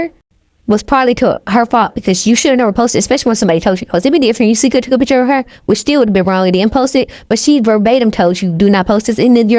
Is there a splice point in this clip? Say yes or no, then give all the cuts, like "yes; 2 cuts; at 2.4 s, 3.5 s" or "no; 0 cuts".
no; 0 cuts